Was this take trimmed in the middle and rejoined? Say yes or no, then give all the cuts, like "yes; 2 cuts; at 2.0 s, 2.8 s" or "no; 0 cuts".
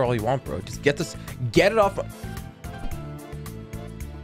no; 0 cuts